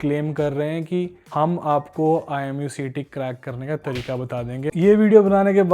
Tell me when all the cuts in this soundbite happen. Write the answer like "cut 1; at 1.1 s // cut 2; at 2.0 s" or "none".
cut 1; at 1.2 s // cut 2; at 4.7 s